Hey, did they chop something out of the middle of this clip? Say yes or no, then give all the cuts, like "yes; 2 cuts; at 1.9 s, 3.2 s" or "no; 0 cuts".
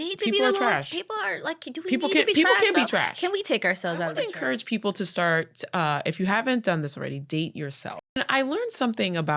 yes; 2 cuts; at 4.2 s, 8.2 s